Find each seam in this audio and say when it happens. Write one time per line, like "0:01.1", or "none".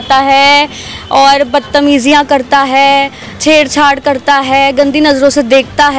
none